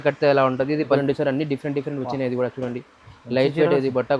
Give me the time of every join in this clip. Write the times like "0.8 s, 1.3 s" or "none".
1.0 s